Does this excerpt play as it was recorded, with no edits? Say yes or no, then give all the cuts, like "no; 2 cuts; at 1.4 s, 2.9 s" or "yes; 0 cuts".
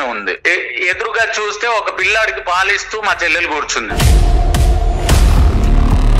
no; 1 cut; at 3.9 s